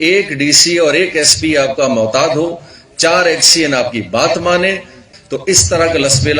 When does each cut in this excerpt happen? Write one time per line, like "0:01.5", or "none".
0:05.1